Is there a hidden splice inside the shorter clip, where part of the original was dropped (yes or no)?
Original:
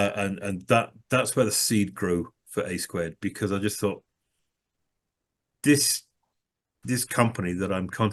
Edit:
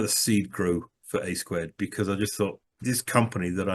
yes